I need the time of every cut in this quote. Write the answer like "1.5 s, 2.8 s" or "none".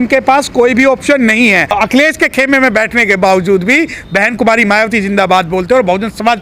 1.7 s